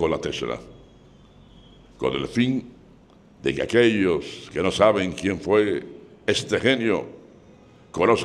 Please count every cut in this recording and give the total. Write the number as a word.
zero